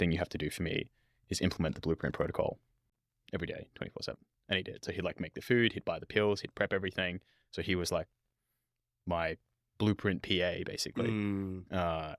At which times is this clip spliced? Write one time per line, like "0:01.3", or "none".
none